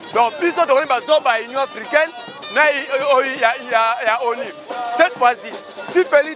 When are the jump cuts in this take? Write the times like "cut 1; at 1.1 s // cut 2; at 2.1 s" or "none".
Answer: none